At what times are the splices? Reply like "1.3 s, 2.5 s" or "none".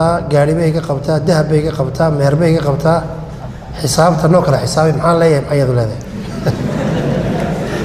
none